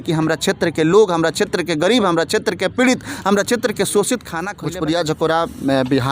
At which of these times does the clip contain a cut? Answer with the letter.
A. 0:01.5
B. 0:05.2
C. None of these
B